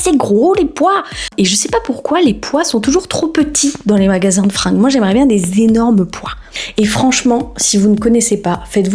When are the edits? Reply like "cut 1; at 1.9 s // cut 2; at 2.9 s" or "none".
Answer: cut 1; at 1.3 s // cut 2; at 6.5 s